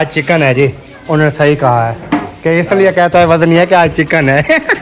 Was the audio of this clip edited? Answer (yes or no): no